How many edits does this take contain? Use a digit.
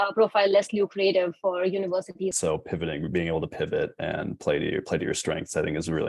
1